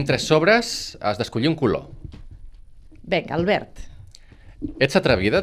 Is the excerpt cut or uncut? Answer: uncut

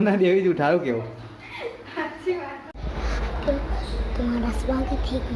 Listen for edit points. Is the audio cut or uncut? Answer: cut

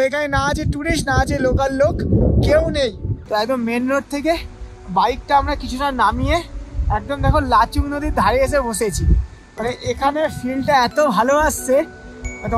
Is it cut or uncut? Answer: cut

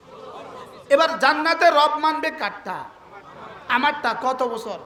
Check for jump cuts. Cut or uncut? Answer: uncut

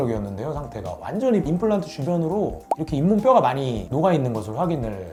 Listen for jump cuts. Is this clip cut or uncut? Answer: uncut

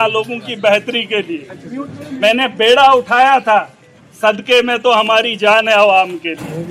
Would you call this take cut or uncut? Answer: uncut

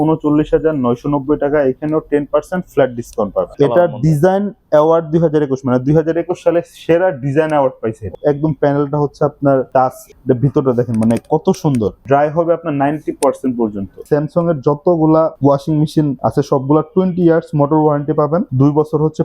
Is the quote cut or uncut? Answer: cut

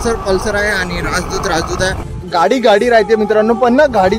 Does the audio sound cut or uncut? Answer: cut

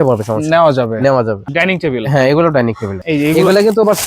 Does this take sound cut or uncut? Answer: cut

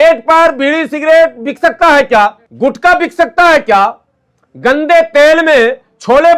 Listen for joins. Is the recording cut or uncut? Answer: cut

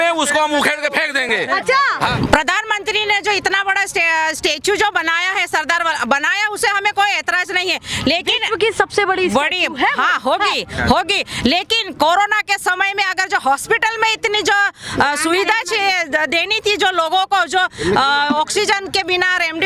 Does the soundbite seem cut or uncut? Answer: uncut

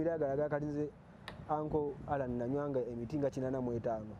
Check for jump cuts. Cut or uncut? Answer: uncut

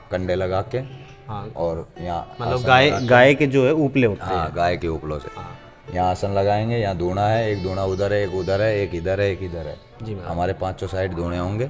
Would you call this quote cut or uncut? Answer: uncut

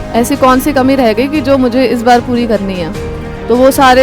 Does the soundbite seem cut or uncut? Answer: uncut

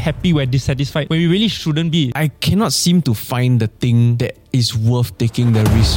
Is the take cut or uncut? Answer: cut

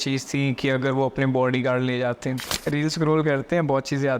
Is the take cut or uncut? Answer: cut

